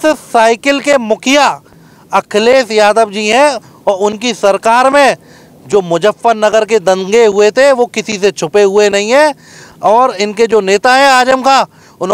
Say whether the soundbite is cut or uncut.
uncut